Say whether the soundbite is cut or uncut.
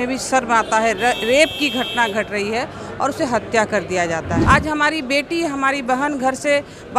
cut